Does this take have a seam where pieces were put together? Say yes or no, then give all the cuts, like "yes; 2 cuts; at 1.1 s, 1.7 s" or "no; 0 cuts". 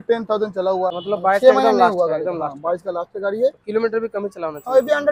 yes; 1 cut; at 1.0 s